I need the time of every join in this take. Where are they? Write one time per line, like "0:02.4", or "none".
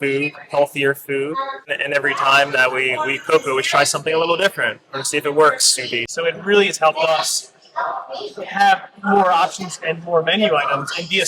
0:01.7
0:06.1